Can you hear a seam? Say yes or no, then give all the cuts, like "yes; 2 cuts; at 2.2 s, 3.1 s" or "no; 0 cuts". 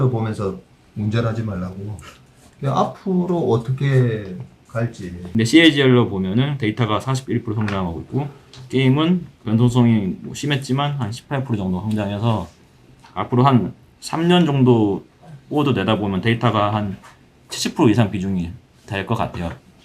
yes; 1 cut; at 5.1 s